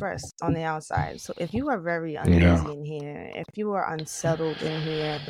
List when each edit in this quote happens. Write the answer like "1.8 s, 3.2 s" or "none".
none